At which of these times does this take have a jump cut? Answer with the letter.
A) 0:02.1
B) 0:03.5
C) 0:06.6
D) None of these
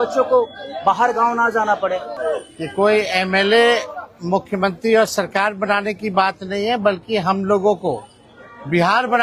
A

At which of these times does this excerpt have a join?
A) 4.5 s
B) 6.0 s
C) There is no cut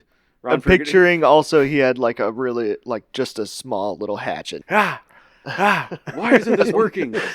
A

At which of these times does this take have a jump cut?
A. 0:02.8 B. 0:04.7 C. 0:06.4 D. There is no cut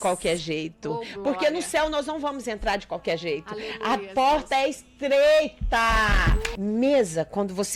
C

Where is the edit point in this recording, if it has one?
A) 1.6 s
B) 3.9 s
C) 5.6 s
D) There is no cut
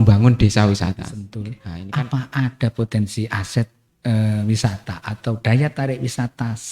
A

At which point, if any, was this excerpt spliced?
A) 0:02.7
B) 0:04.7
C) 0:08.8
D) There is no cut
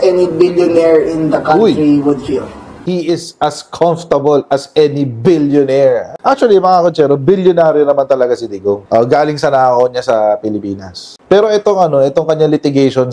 A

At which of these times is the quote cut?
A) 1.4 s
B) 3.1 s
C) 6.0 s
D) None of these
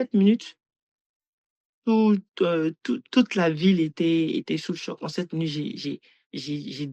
D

